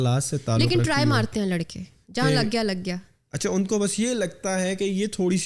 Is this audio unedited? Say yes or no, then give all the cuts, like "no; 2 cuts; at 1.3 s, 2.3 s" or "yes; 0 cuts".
yes; 0 cuts